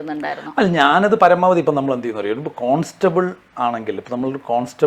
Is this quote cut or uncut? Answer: uncut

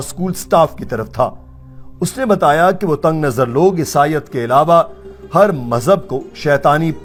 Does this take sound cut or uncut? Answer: uncut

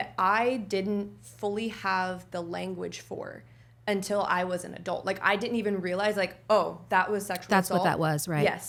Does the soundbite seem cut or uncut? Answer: uncut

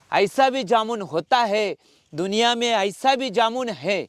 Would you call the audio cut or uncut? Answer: uncut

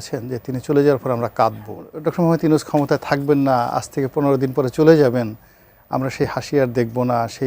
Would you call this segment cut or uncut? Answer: cut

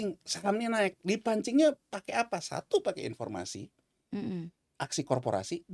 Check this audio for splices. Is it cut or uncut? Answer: uncut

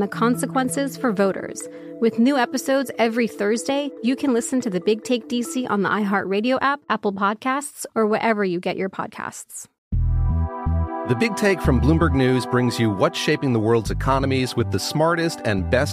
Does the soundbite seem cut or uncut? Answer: cut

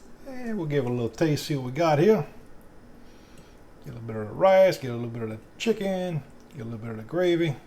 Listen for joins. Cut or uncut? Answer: uncut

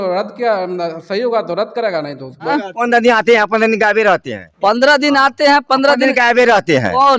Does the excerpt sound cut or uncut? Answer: cut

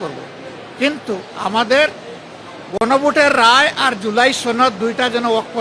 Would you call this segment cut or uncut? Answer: uncut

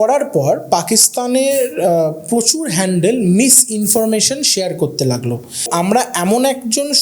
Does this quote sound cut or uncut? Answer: cut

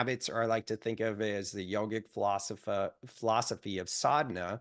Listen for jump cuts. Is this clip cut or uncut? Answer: uncut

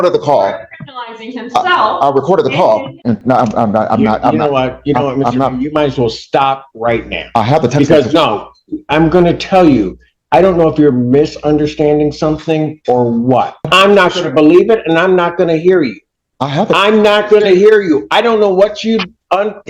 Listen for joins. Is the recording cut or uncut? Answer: cut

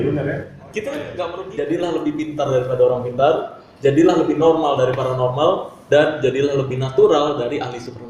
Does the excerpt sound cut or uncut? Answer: cut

